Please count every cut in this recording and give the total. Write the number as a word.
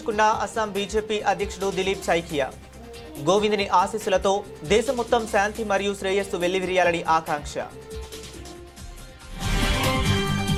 zero